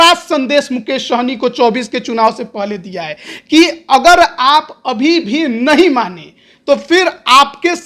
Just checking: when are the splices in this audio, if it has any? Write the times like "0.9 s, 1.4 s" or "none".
none